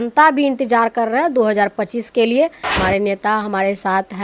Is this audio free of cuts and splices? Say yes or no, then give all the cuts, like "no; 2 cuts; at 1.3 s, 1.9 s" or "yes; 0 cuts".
no; 1 cut; at 2.8 s